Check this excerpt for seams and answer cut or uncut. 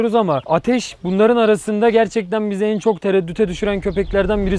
uncut